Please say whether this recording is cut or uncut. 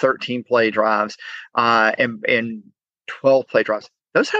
uncut